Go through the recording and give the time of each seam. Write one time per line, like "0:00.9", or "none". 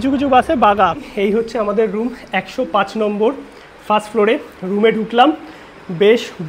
0:01.0